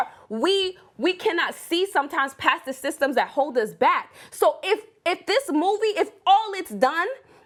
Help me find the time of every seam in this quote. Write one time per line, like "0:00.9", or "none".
none